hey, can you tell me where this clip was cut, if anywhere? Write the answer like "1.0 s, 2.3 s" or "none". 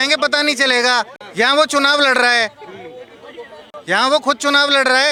none